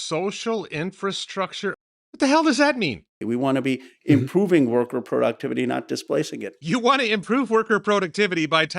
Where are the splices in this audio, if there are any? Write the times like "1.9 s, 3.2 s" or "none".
1.8 s, 3.1 s

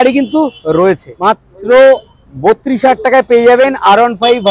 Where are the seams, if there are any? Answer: 1.1 s

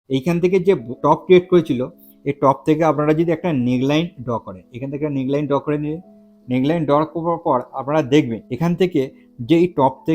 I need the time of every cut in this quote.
1.0 s, 8.4 s

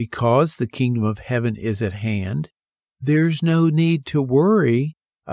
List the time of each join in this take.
none

